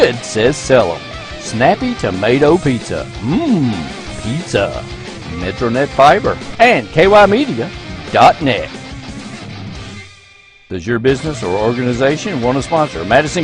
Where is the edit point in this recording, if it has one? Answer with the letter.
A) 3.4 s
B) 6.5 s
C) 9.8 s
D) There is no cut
B